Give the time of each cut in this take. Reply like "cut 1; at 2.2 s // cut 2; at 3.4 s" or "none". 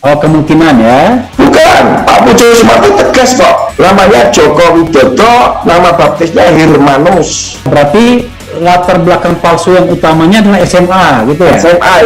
cut 1; at 1.3 s // cut 2; at 3.7 s // cut 3; at 7.7 s